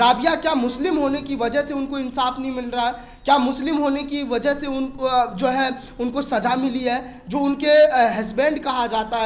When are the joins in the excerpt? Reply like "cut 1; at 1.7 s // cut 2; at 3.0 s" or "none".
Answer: none